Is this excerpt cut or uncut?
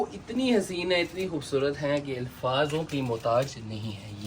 uncut